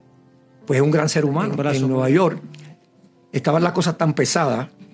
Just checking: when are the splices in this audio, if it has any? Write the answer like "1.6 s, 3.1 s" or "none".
1.7 s

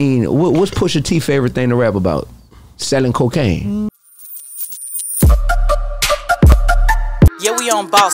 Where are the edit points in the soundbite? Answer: 3.9 s

